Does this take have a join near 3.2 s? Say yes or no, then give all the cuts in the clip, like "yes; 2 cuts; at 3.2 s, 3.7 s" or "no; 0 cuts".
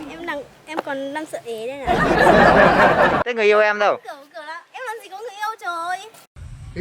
yes; 1 cut; at 3.2 s